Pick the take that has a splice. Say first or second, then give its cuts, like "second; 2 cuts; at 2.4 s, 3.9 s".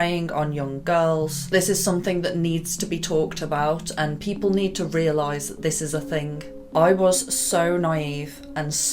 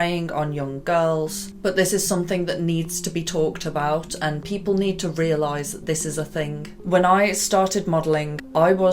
first; 2 cuts; at 1.5 s, 6.5 s